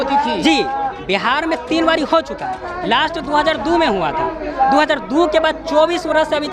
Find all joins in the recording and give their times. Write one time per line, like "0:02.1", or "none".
none